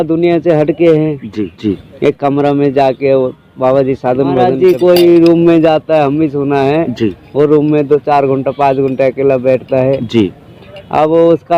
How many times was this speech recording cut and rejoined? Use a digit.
2